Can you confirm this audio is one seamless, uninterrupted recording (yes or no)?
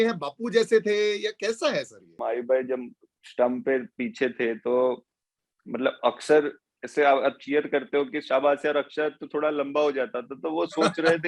no